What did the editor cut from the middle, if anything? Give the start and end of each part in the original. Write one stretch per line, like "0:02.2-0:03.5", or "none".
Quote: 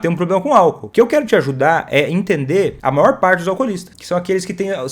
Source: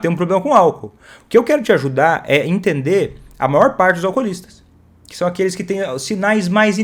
0:00.8-0:01.2
0:03.1-0:03.3
0:04.5-0:05.0